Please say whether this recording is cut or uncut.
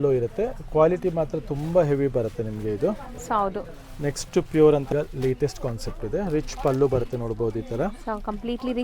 cut